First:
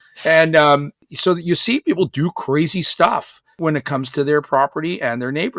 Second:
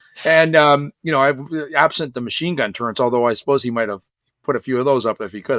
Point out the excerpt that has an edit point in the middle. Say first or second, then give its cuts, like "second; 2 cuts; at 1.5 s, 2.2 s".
first; 2 cuts; at 0.9 s, 3.6 s